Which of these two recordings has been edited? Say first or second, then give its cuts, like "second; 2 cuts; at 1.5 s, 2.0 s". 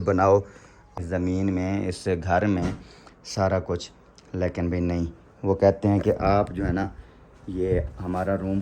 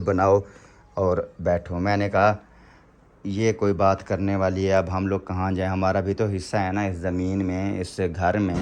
first; 1 cut; at 1.0 s